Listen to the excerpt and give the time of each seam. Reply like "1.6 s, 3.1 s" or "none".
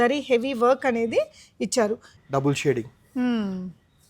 2.1 s